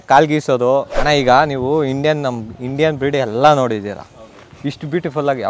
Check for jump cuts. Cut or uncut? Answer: cut